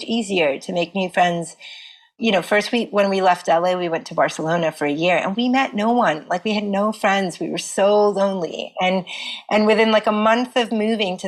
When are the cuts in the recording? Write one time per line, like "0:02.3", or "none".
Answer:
none